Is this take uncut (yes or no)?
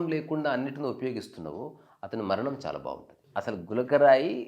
no